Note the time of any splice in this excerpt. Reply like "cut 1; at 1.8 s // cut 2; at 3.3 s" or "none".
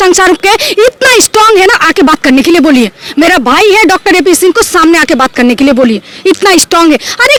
none